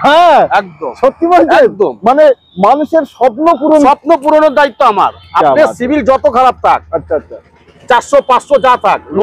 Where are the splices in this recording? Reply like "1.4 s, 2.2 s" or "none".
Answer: none